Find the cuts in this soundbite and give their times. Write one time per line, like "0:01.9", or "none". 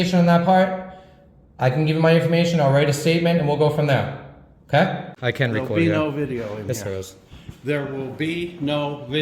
0:05.1